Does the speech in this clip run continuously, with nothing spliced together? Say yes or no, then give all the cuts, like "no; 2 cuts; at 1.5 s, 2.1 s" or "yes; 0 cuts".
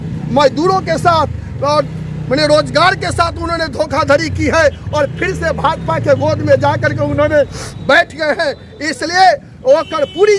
yes; 0 cuts